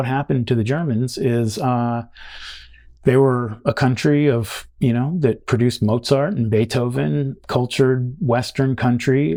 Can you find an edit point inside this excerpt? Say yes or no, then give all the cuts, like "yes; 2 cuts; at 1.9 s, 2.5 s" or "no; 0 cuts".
no; 0 cuts